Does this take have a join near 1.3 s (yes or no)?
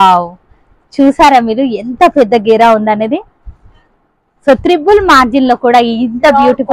no